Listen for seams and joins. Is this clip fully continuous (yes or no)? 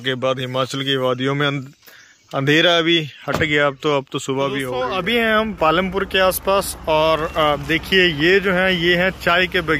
no